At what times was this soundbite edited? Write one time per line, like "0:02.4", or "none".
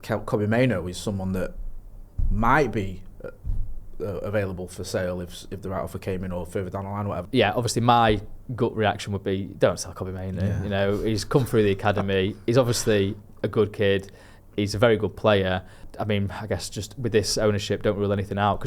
0:07.2
0:15.9